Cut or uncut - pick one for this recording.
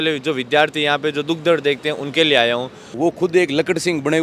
cut